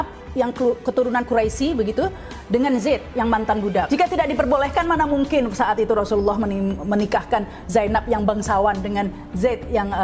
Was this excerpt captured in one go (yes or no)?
no